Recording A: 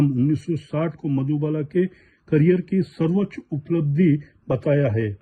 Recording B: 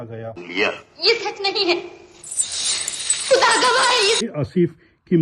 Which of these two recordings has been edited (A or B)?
B